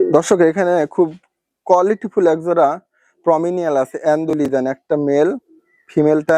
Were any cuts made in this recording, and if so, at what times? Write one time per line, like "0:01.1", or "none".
none

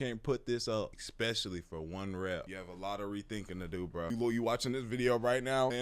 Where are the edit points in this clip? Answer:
0:02.5
0:04.1

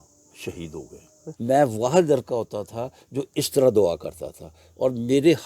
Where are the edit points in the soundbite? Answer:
0:01.2

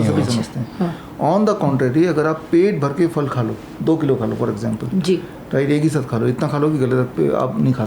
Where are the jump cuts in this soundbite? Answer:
none

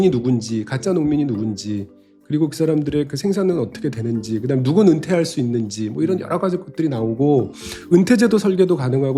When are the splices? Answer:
none

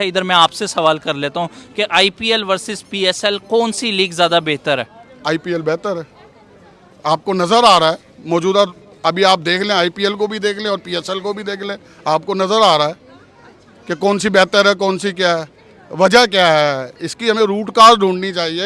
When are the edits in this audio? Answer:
none

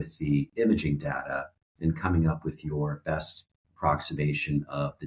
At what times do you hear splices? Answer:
none

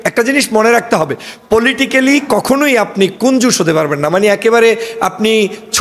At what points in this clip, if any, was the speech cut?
none

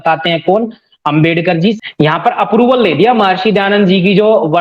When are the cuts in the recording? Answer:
0:01.8

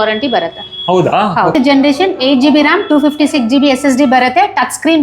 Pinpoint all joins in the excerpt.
0:01.5

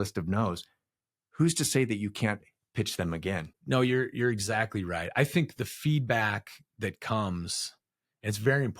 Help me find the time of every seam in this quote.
0:03.5

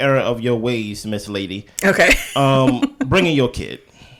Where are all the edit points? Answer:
none

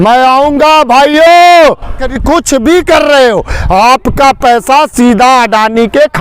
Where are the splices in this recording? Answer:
0:02.1

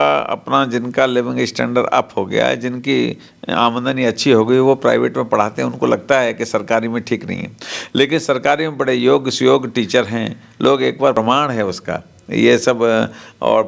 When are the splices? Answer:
0:11.2

